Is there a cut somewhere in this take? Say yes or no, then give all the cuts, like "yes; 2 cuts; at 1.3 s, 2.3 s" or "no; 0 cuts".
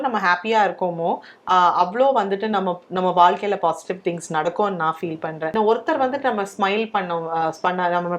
yes; 1 cut; at 5.5 s